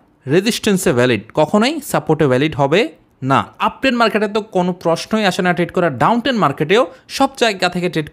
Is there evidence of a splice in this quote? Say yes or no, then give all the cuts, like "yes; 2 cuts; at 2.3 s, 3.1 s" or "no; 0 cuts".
yes; 1 cut; at 3.5 s